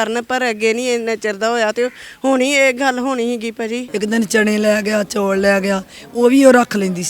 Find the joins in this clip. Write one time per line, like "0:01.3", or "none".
0:03.9